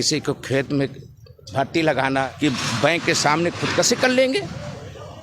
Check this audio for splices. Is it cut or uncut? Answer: cut